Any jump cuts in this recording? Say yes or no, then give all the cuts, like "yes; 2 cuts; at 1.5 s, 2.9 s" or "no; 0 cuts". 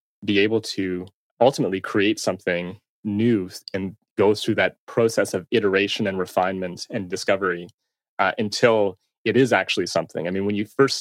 yes; 2 cuts; at 1.2 s, 3.0 s